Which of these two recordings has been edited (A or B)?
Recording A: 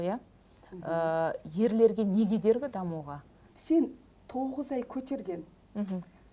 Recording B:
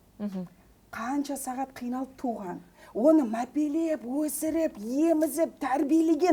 A